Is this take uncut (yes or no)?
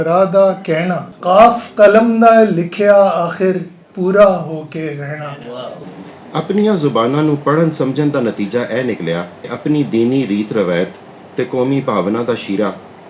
no